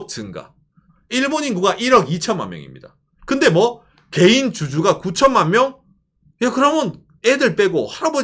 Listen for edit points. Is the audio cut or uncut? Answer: uncut